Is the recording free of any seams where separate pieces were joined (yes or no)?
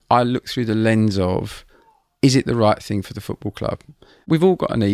yes